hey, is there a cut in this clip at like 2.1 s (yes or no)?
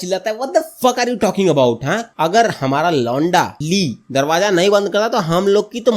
yes